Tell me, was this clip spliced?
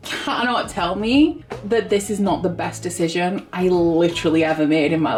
no; 0 cuts

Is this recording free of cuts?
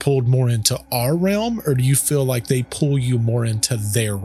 yes; 0 cuts

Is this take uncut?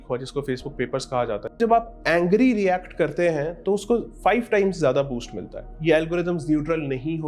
no; 2 cuts; at 1.6 s, 5.7 s

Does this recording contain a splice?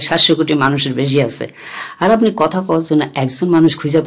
no; 0 cuts

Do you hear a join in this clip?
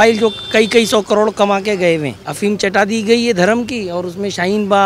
yes; 1 cut; at 2.2 s

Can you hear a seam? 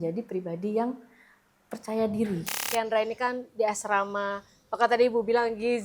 yes; 1 cut; at 2.6 s

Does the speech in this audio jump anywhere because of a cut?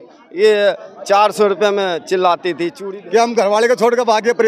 yes; 1 cut; at 2.8 s

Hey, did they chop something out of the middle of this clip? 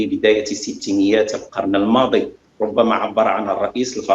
yes; 1 cut; at 2.4 s

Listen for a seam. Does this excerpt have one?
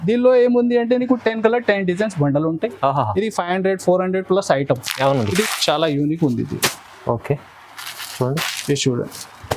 yes; 1 cut; at 5.4 s

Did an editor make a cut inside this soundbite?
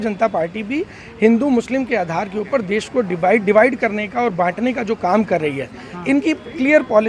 no; 0 cuts

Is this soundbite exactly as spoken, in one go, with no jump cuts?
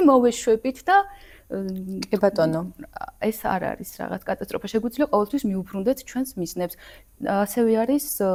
yes; 0 cuts

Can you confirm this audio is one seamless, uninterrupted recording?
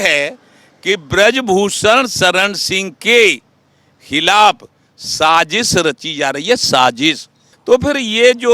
no; 1 cut; at 7.5 s

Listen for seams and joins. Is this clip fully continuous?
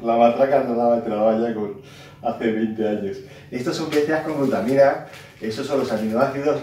yes; 0 cuts

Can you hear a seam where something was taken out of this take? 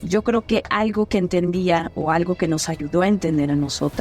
no; 0 cuts

